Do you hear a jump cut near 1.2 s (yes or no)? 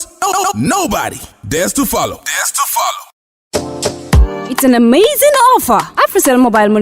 no